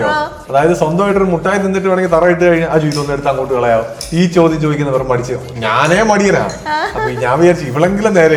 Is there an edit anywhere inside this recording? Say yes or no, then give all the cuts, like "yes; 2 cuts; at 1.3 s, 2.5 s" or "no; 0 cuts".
no; 0 cuts